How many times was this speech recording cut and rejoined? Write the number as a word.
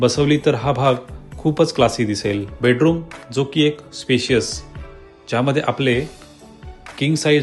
one